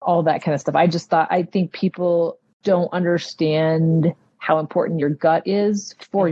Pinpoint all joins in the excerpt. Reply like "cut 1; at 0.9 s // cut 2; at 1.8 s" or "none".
cut 1; at 2.6 s